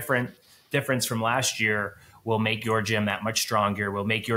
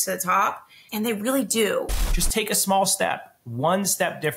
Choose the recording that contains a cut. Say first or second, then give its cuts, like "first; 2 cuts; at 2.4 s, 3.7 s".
second; 1 cut; at 2.0 s